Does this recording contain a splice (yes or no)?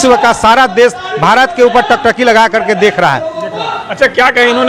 no